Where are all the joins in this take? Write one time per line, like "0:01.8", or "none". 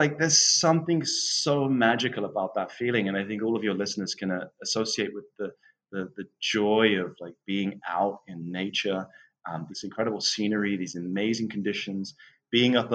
0:09.7